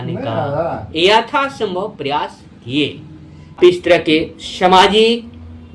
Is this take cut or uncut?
cut